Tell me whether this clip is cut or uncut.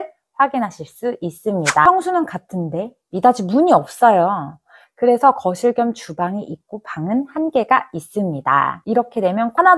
cut